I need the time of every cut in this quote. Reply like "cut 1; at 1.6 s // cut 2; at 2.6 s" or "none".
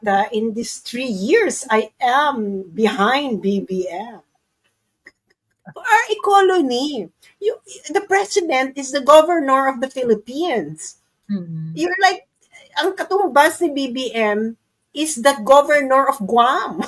cut 1; at 5.7 s